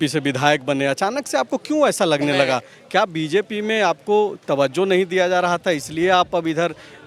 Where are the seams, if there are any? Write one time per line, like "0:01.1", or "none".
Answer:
none